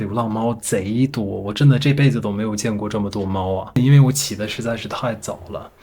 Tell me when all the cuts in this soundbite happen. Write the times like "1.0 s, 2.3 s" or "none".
3.8 s

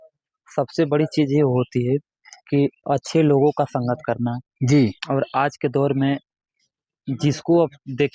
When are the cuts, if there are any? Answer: none

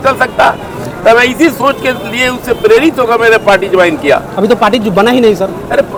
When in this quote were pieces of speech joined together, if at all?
none

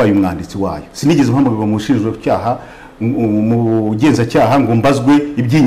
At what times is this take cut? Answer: none

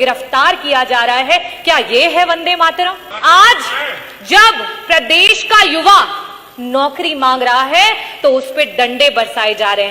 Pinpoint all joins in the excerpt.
3.1 s

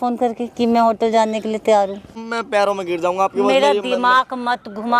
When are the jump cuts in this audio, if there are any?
2.2 s

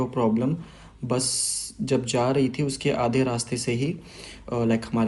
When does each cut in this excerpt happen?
none

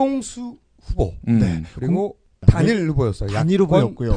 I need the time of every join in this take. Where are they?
2.0 s

